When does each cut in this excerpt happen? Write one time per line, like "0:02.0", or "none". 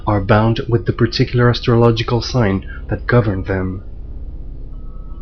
0:01.2

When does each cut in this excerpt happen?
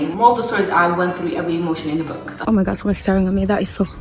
0:02.2

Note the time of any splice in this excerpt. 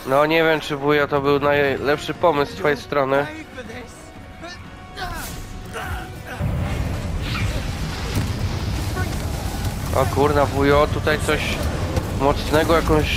0:06.4

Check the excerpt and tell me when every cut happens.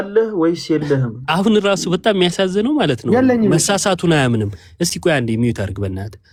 none

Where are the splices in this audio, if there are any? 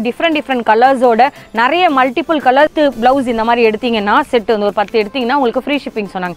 0:02.7

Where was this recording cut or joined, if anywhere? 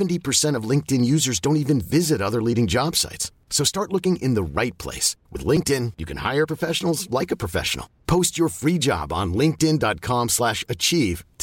none

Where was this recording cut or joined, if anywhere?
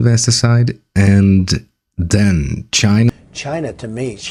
none

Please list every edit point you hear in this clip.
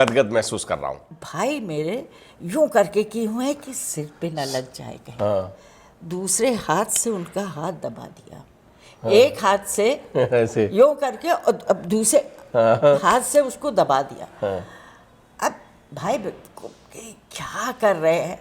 0:01.2

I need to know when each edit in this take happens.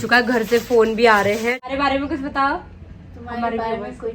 0:01.6

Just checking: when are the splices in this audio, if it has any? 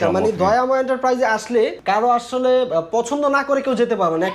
0:01.8

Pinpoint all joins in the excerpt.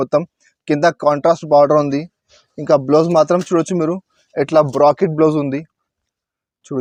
none

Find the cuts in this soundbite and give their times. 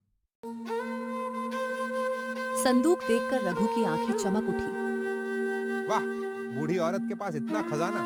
none

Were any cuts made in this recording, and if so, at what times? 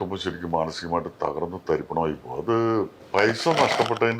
0:03.0

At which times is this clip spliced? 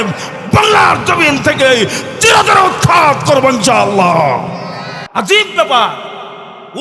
0:05.0

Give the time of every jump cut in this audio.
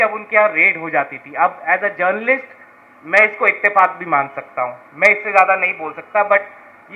none

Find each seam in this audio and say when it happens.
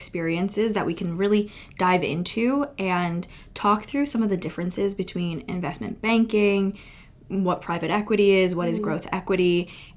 none

